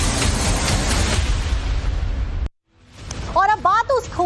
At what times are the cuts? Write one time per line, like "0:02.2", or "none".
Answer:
none